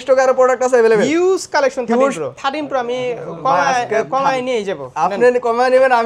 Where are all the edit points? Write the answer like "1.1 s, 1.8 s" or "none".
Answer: 2.3 s